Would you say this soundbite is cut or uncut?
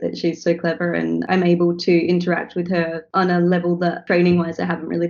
cut